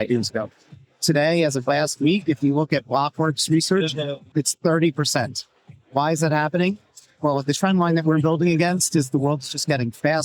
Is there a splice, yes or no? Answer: yes